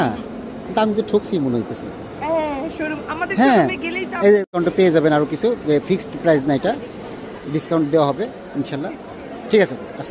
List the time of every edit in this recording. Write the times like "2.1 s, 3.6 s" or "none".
4.5 s